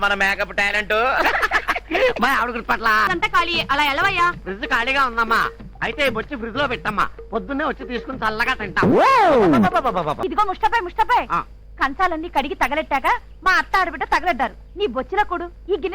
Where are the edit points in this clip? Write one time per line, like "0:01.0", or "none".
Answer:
0:03.1
0:10.2

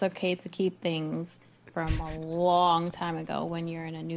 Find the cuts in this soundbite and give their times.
none

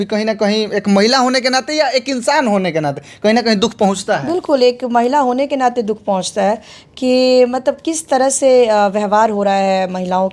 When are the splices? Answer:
none

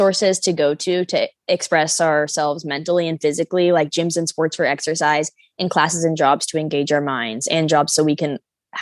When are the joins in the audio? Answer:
0:01.3

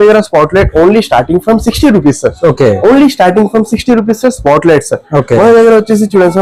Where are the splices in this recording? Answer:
none

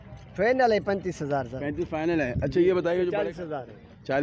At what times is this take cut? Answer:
0:03.1

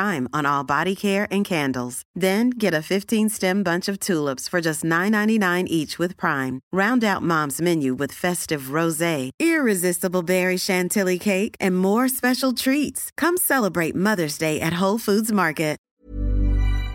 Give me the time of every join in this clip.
0:15.8

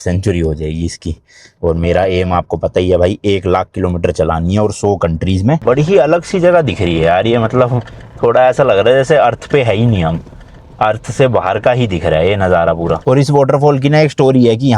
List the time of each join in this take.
0:05.6
0:13.0

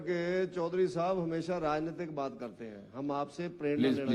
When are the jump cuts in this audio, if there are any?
none

